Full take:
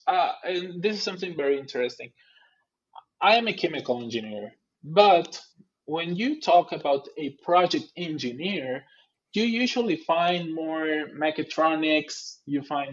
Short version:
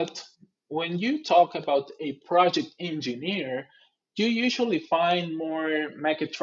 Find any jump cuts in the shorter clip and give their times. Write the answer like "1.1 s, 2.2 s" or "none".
none